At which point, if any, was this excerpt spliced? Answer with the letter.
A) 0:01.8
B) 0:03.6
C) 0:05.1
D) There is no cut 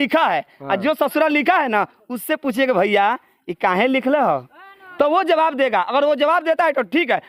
D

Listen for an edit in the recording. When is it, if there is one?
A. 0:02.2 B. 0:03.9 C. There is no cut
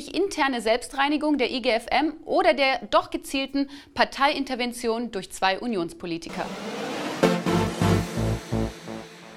B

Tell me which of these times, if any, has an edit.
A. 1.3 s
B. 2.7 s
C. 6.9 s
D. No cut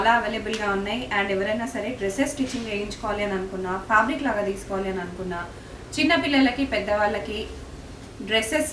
D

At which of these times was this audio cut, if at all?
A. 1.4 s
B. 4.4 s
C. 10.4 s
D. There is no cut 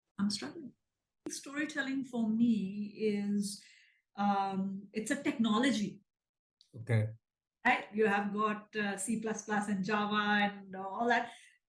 A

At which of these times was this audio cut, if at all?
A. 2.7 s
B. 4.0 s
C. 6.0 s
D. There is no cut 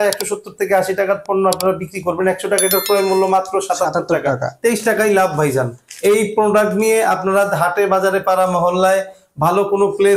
D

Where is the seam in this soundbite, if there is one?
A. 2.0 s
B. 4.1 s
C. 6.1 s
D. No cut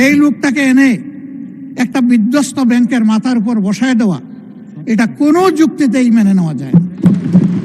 D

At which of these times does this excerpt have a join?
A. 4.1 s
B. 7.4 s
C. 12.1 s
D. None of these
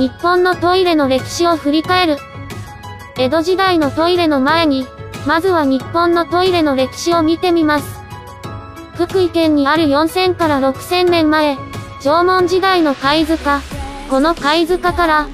B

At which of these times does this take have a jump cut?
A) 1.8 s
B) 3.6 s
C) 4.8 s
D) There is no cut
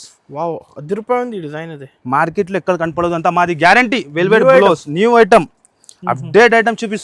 D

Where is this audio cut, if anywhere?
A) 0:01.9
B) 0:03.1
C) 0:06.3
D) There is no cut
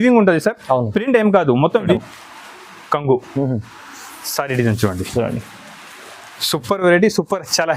A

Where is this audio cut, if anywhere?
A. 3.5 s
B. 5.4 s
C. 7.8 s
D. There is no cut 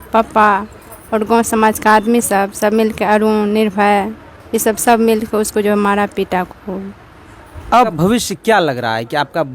C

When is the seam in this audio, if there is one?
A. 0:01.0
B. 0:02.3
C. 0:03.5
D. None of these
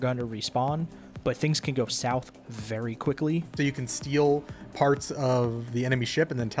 C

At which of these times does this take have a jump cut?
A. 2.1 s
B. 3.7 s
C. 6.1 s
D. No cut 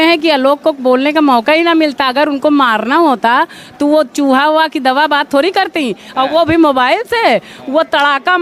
D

